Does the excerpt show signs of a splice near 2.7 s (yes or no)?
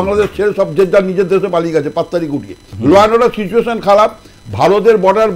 yes